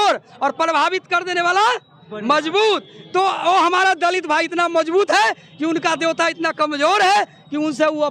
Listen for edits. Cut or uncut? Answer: uncut